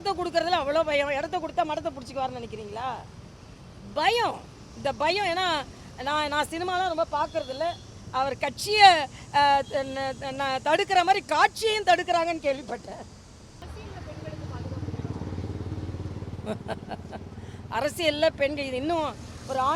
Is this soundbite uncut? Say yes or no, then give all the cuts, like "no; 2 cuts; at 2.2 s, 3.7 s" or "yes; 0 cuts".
no; 1 cut; at 13.6 s